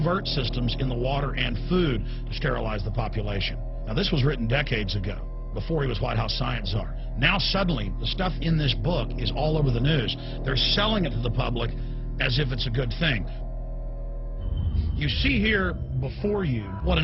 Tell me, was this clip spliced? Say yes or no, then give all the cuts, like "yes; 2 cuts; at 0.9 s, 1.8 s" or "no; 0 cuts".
no; 0 cuts